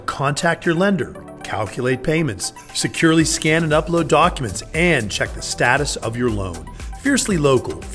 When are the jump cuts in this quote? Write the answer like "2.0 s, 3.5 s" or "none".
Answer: none